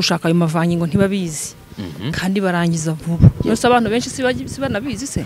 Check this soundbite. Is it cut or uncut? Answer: uncut